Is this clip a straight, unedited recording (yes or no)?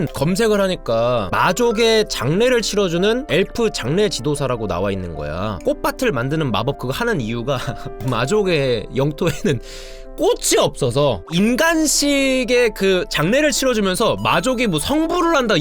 no